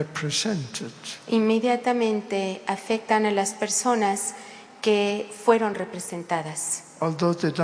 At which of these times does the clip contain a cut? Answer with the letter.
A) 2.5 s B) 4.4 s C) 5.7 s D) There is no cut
C